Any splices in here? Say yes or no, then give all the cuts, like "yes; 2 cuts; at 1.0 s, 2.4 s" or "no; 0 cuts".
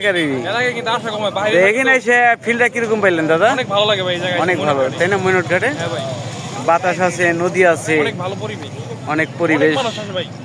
no; 0 cuts